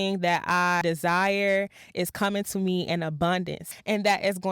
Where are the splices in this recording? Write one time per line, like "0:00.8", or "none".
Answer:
0:00.8
0:03.6